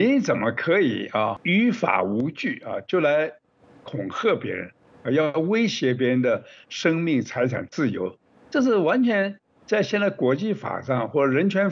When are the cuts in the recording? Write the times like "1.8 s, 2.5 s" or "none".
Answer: 1.4 s